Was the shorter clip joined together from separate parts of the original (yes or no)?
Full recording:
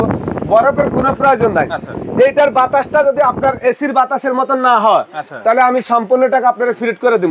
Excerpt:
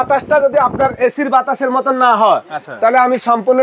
no